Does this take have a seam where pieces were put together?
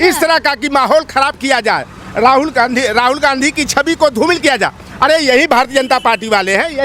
no; 0 cuts

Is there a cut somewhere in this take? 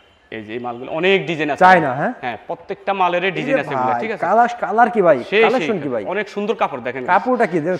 no; 0 cuts

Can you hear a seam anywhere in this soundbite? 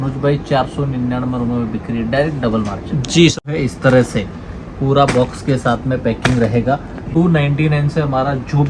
yes; 2 cuts; at 3.5 s, 7.0 s

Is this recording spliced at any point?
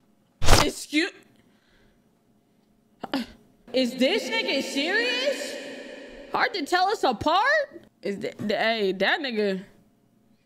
yes; 2 cuts; at 3.5 s, 7.9 s

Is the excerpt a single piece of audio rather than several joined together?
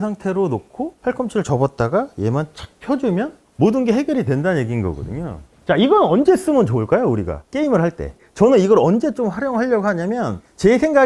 yes; 0 cuts

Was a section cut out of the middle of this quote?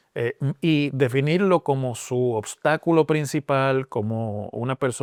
no; 0 cuts

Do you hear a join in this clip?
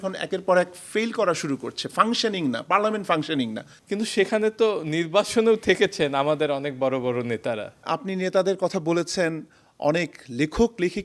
yes; 2 cuts; at 3.7 s, 7.8 s

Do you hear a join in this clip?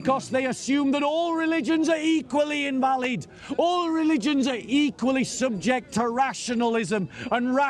no; 0 cuts

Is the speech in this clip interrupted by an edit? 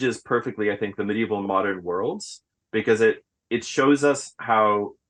no; 0 cuts

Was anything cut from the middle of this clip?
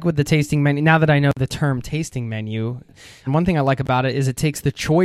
yes; 1 cut; at 3.2 s

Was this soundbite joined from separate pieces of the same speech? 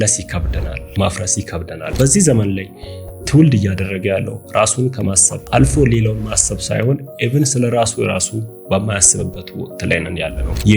yes; 1 cut; at 1.9 s

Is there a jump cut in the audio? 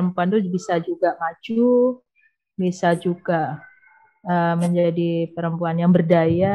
no; 0 cuts

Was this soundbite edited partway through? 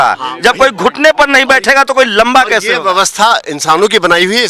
no; 0 cuts

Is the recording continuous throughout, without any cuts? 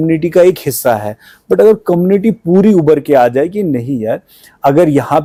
yes; 0 cuts

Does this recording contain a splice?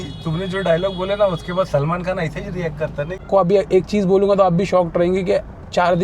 yes; 1 cut; at 3.1 s

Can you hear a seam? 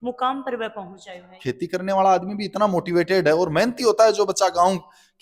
yes; 1 cut; at 1.3 s

